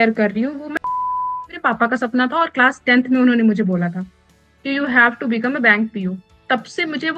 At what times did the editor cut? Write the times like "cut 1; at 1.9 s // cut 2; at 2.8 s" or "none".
cut 1; at 1.0 s